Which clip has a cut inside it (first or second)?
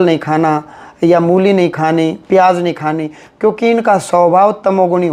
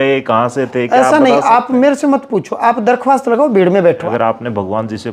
second